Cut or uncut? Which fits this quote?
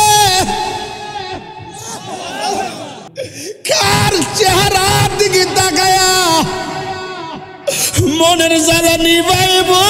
cut